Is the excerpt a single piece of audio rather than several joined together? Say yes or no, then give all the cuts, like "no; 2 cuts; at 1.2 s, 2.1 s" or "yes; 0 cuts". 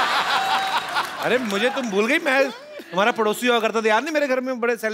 yes; 0 cuts